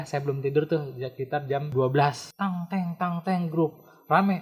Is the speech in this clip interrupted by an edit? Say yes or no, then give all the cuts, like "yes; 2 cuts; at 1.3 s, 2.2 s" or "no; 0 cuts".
yes; 2 cuts; at 1.7 s, 2.3 s